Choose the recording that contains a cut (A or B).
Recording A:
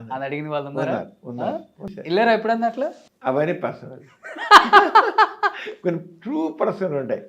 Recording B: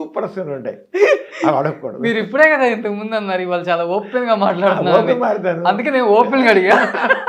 A